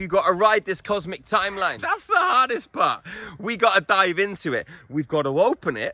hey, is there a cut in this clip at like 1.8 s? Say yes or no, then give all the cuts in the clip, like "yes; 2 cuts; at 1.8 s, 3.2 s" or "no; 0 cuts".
yes; 1 cut; at 1.8 s